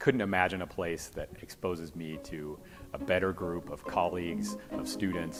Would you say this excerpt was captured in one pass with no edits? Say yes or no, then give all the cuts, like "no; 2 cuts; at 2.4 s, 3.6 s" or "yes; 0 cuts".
yes; 0 cuts